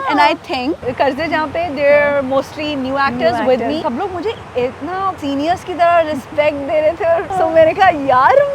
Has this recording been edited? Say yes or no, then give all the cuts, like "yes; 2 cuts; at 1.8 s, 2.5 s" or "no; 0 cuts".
yes; 4 cuts; at 0.8 s, 3.8 s, 5.2 s, 7.3 s